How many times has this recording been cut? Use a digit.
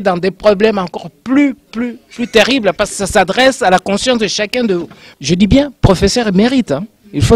1